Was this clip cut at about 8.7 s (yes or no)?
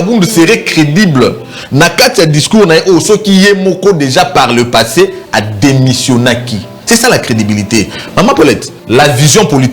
yes